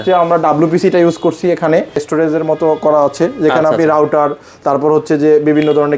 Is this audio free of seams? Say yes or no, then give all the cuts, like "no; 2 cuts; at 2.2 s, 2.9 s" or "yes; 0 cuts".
no; 1 cut; at 2.0 s